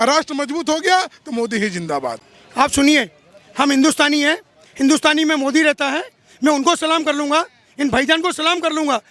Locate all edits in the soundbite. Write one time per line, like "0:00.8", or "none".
0:02.2